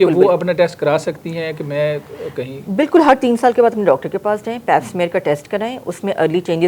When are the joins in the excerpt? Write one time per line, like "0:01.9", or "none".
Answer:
none